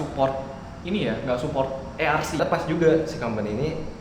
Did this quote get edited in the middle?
yes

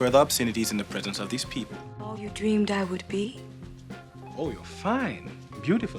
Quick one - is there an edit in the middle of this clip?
yes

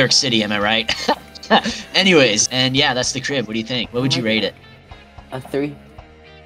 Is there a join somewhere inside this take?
yes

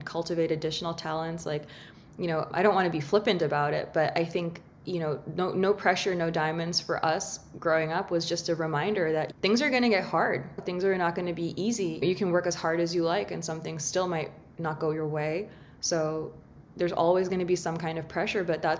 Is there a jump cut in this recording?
yes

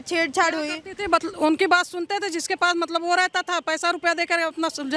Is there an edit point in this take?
no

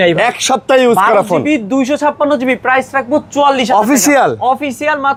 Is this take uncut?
yes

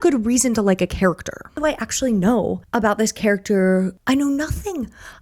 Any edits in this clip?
yes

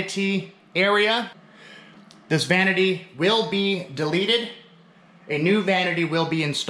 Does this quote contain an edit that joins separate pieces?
yes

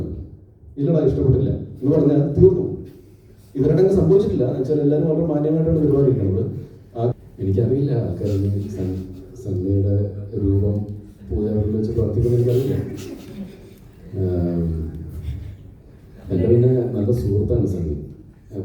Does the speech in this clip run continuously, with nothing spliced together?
no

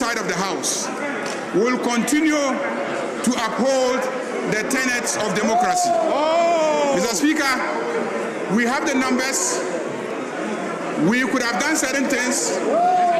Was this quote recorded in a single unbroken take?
yes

